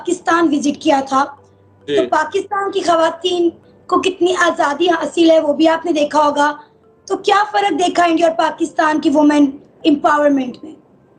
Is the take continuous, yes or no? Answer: yes